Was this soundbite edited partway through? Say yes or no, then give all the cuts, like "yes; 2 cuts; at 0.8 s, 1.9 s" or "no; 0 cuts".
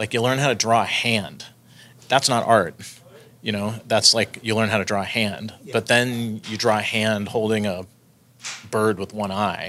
no; 0 cuts